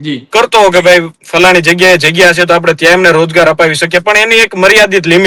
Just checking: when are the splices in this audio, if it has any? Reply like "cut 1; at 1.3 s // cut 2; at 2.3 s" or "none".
none

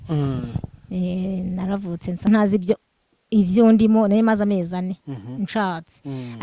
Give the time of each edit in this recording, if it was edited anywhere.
cut 1; at 2.3 s

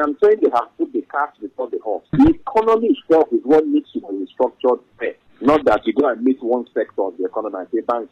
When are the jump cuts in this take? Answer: cut 1; at 2.1 s

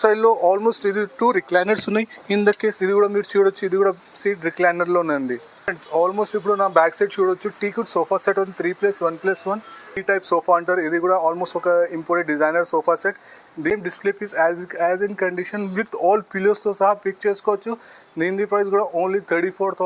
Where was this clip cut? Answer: cut 1; at 5.6 s // cut 2; at 9.9 s // cut 3; at 13.7 s

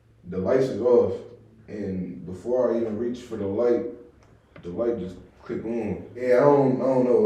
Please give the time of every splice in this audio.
cut 1; at 6.2 s

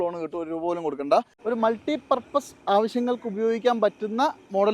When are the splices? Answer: cut 1; at 1.3 s

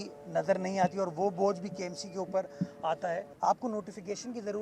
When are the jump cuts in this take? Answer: cut 1; at 3.3 s

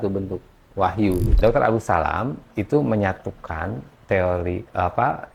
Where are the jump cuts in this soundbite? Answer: cut 1; at 1.3 s

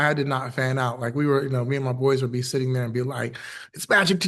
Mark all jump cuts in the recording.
none

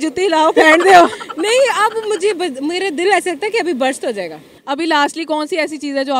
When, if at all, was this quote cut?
cut 1; at 4.5 s

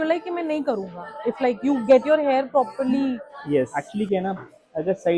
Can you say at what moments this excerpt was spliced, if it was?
cut 1; at 3.8 s

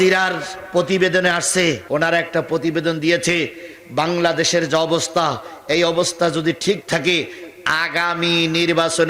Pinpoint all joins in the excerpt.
cut 1; at 1.8 s

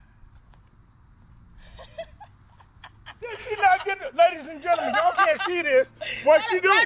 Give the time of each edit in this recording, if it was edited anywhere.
none

